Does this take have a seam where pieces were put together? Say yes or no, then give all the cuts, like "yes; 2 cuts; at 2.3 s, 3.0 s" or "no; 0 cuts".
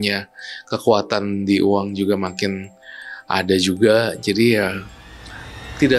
no; 0 cuts